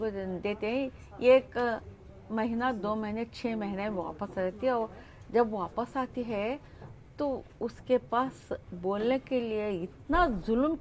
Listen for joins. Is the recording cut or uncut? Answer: uncut